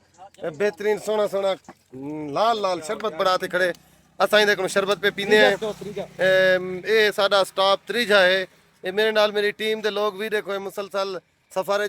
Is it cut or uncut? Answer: uncut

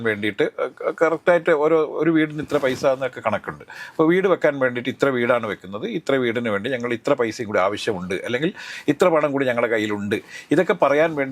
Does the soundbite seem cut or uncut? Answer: uncut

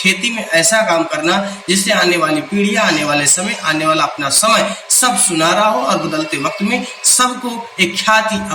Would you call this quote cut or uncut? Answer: uncut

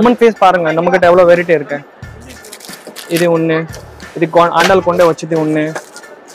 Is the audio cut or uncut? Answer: uncut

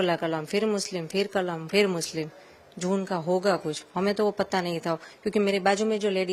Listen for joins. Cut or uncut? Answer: uncut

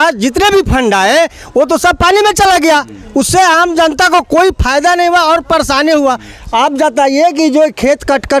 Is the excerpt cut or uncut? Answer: uncut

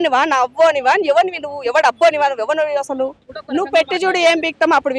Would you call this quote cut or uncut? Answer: cut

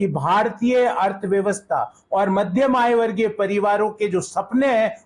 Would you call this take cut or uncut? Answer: uncut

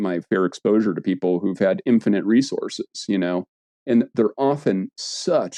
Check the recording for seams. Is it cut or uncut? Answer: uncut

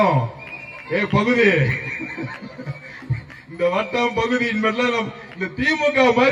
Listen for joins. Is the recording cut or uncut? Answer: uncut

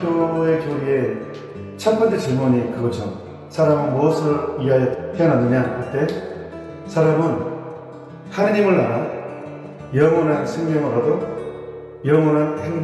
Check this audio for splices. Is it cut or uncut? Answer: cut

